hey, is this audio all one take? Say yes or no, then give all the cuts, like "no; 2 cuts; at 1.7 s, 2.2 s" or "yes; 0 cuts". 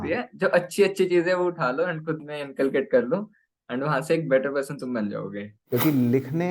no; 1 cut; at 5.6 s